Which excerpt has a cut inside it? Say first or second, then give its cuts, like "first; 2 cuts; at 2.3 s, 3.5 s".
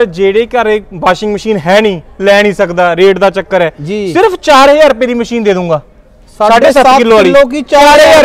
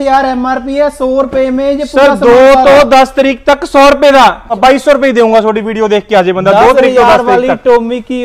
second; 1 cut; at 4.5 s